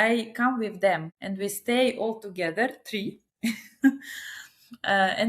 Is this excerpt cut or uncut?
uncut